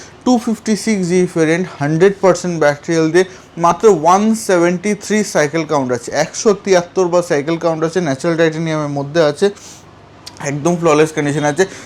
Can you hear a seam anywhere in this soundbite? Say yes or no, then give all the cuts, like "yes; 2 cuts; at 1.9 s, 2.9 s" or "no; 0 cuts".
no; 0 cuts